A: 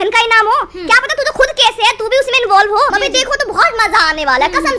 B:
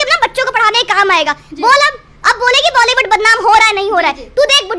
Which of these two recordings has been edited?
A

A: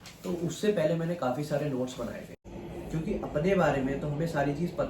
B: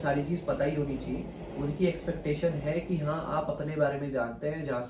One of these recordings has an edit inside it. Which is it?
A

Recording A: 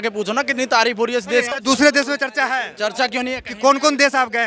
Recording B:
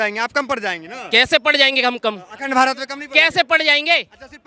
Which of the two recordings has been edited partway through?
A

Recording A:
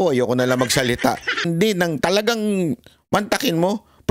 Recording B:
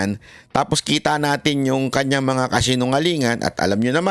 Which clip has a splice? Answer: A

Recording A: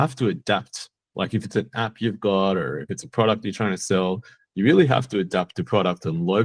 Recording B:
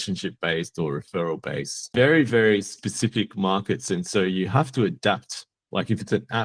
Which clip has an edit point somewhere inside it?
B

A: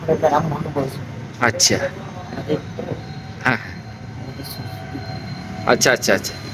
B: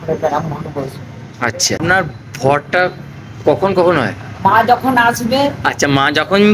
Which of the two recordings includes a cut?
B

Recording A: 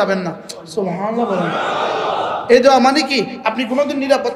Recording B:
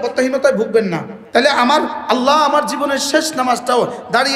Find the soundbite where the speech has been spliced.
B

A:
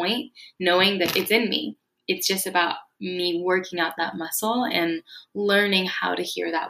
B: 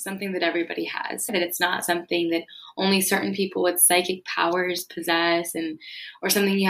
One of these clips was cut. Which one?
B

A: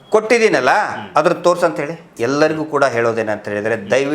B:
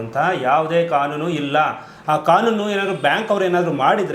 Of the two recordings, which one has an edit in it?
A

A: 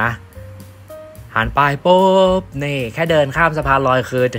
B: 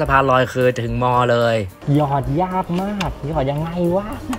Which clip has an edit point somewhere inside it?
B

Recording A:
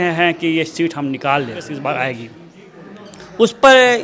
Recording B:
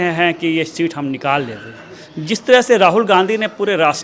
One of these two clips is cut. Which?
A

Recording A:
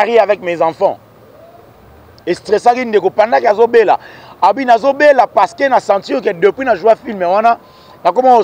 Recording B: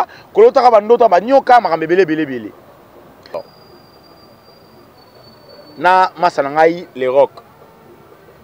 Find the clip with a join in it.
B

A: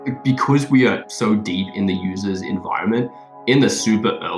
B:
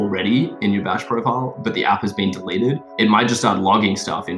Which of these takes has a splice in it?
B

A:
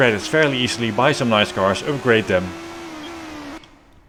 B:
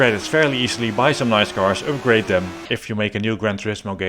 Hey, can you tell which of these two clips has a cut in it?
B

